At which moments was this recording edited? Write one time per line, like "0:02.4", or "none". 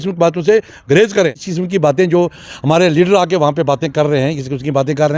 0:01.5